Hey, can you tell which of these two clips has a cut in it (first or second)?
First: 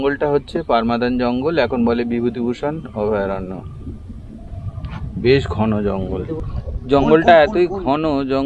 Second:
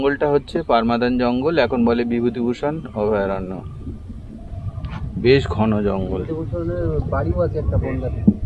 first